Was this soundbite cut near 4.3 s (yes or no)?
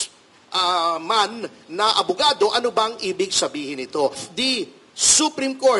yes